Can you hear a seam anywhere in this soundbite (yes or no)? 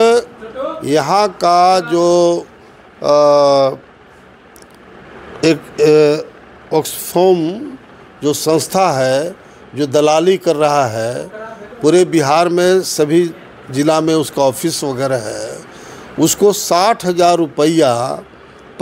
no